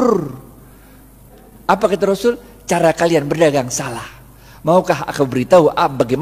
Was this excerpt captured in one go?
no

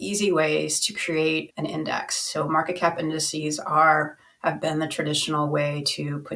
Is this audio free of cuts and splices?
no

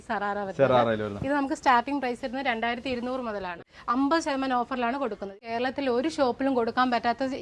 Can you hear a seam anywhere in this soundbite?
yes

